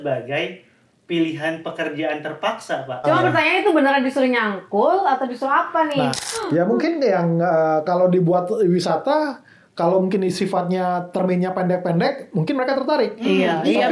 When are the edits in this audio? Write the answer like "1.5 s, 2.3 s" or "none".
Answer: 3.0 s, 6.2 s